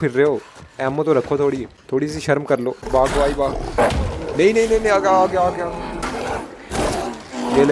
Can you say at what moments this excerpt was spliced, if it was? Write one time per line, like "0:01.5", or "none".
0:01.7
0:02.9
0:06.0